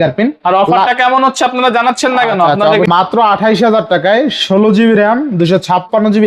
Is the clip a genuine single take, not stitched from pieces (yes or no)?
no